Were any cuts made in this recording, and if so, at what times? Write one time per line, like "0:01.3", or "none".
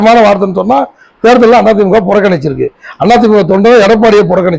none